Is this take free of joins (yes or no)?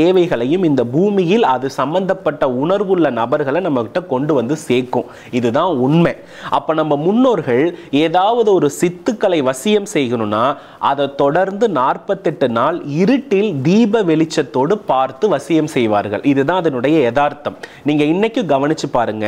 yes